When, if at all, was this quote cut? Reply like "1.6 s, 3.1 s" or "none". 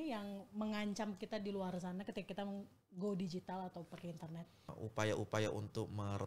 4.7 s